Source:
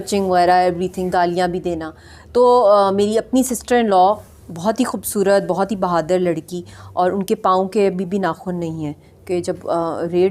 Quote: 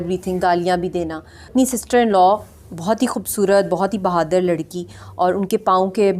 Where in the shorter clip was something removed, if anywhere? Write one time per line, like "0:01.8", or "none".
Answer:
0:01.5